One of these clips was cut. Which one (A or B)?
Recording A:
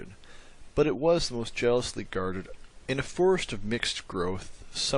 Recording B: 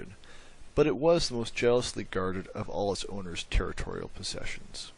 B